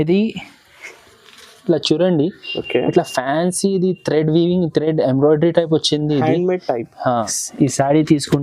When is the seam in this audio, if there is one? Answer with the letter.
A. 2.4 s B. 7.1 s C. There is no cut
B